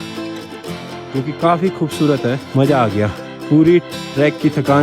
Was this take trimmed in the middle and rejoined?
yes; 2 cuts; at 2.4 s, 3.3 s

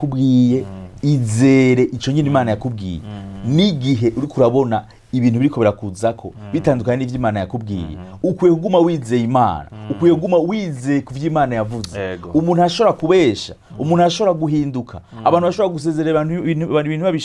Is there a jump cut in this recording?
no; 0 cuts

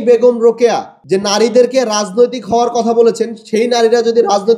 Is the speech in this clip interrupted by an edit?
yes; 1 cut; at 0.9 s

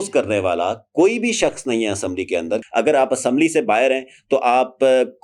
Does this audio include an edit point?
yes; 1 cut; at 2.6 s

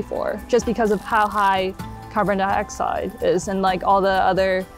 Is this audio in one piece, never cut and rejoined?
no; 1 cut; at 1.0 s

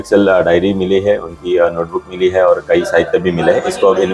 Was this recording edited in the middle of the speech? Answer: no; 0 cuts

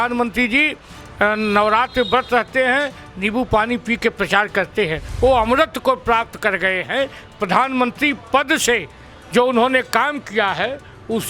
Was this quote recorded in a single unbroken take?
no; 1 cut; at 5.0 s

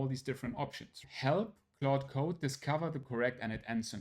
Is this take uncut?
no; 1 cut; at 1.1 s

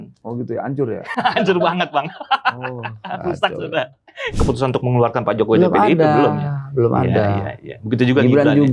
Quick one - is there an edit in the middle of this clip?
yes; 1 cut; at 4.4 s

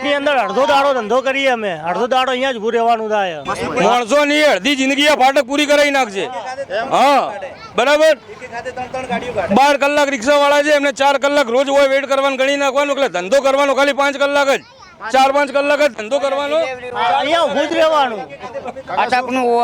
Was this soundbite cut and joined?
yes; 1 cut; at 3.9 s

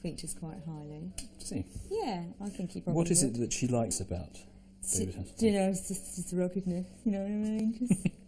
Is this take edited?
yes; 1 cut; at 3.7 s

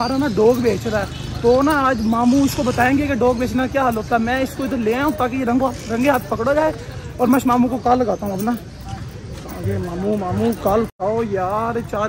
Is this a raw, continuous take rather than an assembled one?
yes; 0 cuts

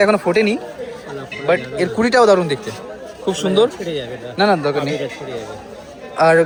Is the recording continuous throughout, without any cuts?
yes; 0 cuts

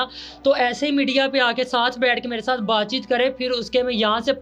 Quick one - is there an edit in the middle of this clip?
no; 0 cuts

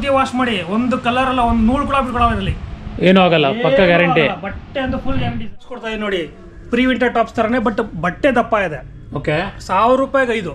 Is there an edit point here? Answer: yes; 1 cut; at 5.6 s

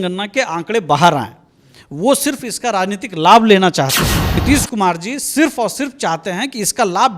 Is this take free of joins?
no; 1 cut; at 4.4 s

